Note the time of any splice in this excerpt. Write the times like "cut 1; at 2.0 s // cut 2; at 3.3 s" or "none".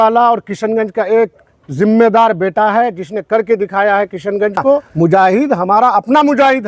cut 1; at 4.9 s